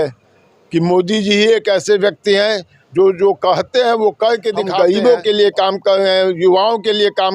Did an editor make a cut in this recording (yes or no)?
yes